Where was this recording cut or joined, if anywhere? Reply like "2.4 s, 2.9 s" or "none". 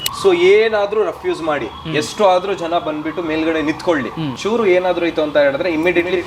4.4 s

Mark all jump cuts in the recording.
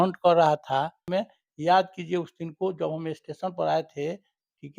1.0 s

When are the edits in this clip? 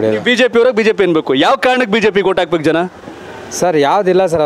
none

